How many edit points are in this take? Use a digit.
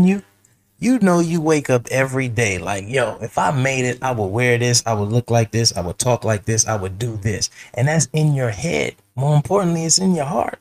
1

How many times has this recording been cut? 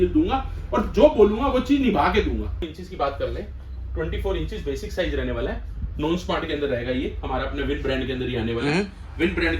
1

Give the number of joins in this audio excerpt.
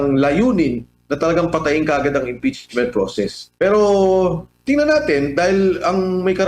1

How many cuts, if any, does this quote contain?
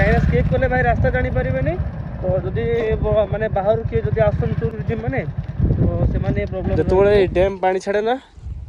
2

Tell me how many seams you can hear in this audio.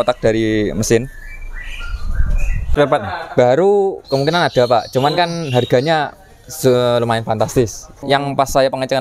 2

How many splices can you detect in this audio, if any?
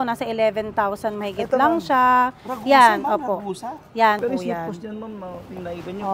1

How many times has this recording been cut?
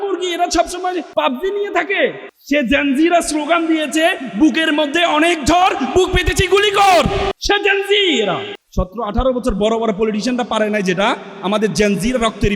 4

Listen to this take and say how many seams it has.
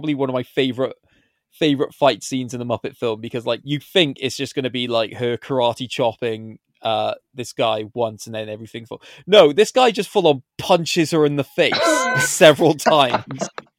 1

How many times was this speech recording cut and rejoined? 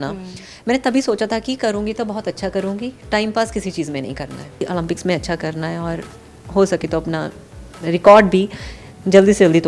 1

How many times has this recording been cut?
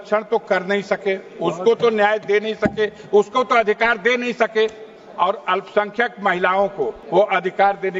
1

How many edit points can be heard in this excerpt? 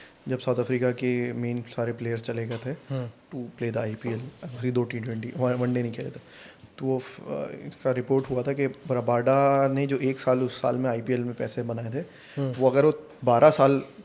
0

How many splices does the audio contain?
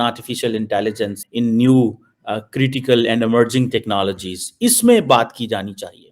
1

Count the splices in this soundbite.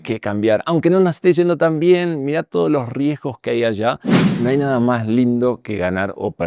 1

